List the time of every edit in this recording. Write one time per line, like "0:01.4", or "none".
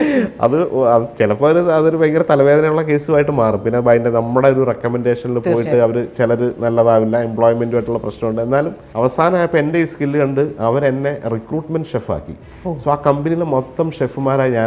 0:08.8

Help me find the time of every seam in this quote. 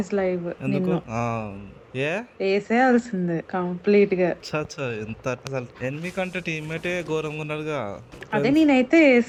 none

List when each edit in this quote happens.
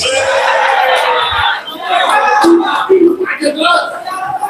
none

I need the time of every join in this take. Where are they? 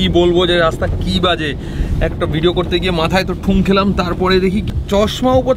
0:04.7

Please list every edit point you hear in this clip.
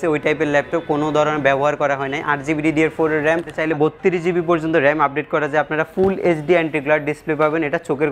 0:03.5

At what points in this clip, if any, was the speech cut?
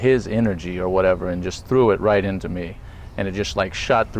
0:02.9

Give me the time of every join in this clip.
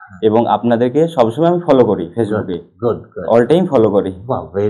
none

